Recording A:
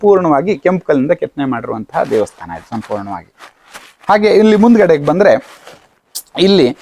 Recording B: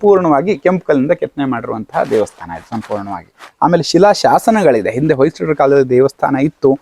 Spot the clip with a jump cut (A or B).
B